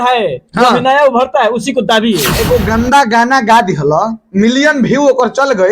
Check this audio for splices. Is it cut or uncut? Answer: cut